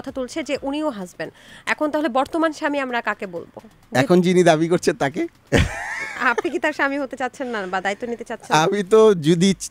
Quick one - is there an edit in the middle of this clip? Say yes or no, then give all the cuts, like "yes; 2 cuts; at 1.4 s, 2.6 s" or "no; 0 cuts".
no; 0 cuts